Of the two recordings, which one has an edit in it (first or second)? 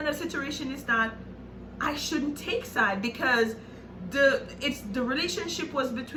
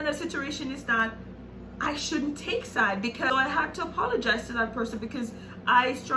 second